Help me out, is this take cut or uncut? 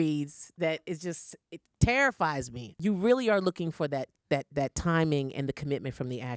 cut